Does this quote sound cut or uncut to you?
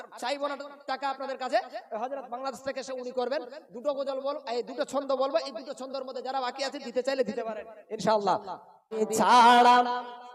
cut